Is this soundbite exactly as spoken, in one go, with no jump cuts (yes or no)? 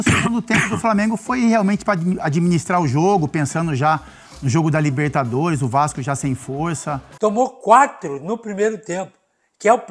no